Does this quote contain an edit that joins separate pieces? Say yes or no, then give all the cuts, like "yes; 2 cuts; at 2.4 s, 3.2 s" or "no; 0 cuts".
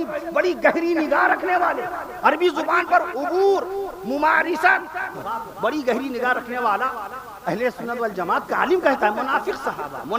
yes; 1 cut; at 5.2 s